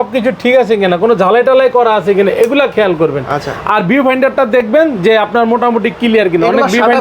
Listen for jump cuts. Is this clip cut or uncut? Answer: uncut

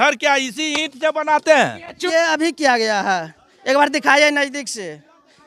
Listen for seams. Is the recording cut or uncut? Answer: cut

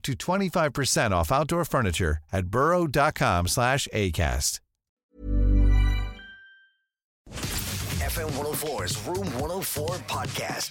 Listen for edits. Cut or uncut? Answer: cut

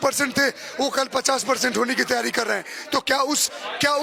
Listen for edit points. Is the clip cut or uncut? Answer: uncut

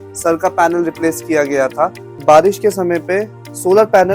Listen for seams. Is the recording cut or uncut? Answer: cut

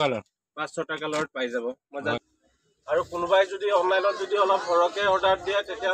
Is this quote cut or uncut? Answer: cut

